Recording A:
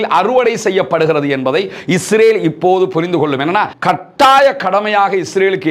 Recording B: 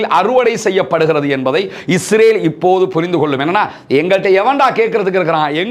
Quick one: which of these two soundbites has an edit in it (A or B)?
A